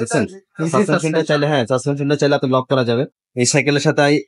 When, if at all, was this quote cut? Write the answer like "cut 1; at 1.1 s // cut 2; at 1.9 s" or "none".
cut 1; at 3.2 s